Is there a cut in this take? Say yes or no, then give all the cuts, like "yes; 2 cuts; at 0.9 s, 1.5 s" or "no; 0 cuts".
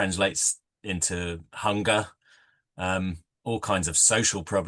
no; 0 cuts